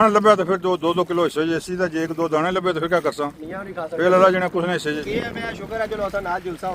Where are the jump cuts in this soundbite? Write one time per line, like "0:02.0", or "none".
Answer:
0:05.0